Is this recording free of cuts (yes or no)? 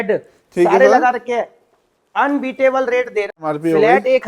no